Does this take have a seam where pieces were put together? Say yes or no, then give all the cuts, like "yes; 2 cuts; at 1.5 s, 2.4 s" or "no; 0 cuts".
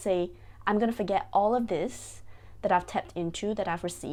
no; 0 cuts